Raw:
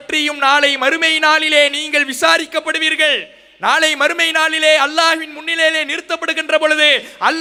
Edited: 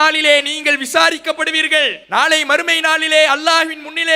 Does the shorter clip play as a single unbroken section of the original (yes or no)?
no